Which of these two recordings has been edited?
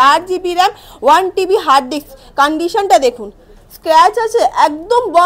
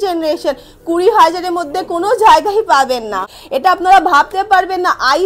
second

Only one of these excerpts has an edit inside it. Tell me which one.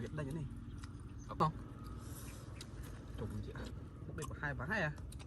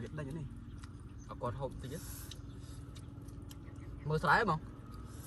first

